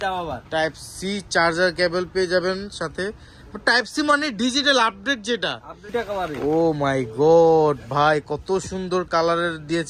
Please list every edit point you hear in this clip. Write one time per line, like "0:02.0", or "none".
0:05.9

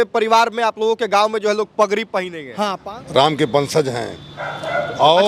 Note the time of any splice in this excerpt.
0:02.8

